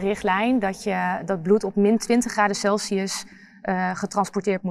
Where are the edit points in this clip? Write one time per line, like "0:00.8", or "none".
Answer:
none